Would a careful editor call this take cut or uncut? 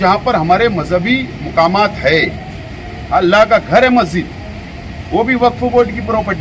uncut